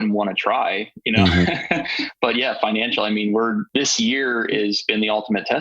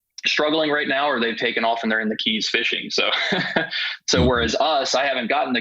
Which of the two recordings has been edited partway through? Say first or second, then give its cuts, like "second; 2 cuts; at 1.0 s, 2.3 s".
first; 1 cut; at 3.7 s